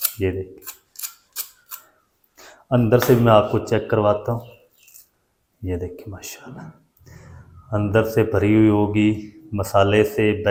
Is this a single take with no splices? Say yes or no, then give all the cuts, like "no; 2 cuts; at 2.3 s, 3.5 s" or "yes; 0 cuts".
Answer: yes; 0 cuts